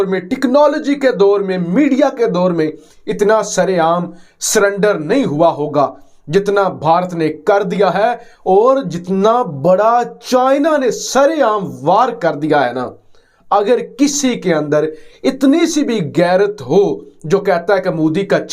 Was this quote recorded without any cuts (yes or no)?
yes